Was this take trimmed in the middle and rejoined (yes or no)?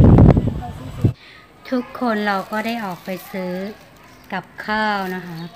yes